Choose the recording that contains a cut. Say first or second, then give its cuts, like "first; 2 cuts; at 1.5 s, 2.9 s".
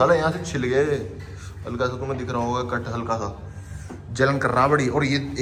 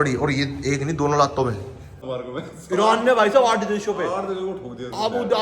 second; 1 cut; at 2.0 s